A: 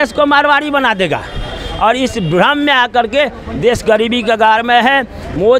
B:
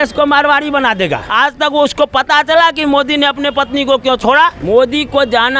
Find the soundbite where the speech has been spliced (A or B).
B